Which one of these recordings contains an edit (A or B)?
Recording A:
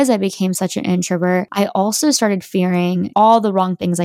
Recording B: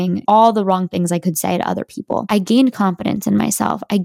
B